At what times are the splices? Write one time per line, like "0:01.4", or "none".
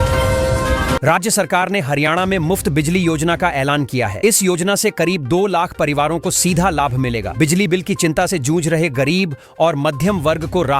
0:01.0